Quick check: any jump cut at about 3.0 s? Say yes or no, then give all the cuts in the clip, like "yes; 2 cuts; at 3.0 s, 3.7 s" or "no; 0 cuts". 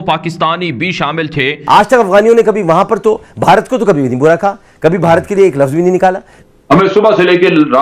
no; 2 cuts; at 1.5 s, 6.3 s